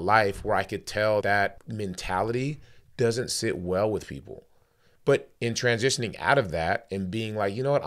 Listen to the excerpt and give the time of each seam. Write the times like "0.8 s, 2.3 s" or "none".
1.2 s